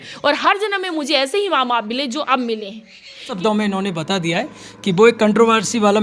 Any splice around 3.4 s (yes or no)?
yes